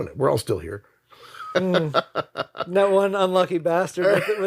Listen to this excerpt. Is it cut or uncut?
uncut